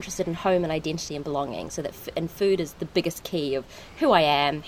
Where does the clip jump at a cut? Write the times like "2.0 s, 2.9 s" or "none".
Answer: none